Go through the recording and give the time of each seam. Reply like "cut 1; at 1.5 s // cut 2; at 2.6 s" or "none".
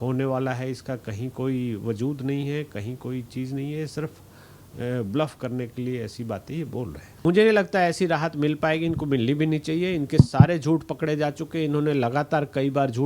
cut 1; at 7.1 s